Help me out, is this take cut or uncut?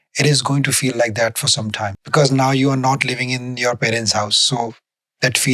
cut